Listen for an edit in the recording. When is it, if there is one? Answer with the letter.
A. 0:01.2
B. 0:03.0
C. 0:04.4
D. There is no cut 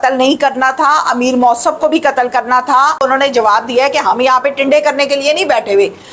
B